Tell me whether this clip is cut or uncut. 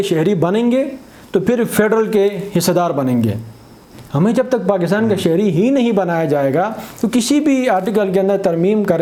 uncut